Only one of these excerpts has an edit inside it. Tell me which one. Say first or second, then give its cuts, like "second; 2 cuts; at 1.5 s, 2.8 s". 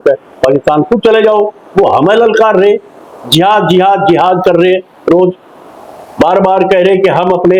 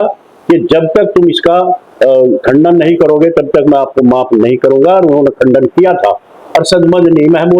second; 1 cut; at 6.4 s